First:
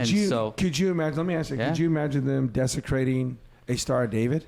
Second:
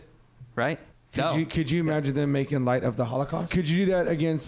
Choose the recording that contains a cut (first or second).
second